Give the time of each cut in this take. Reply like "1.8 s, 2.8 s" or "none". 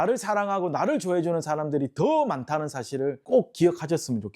3.2 s